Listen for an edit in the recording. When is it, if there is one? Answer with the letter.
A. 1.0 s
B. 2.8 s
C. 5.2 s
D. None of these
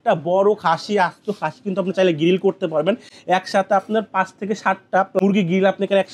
C